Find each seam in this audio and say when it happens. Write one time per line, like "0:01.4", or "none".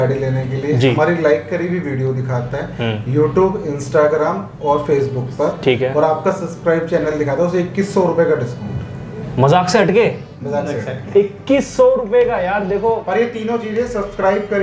none